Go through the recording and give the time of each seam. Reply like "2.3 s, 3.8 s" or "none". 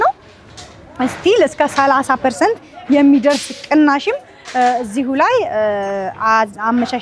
none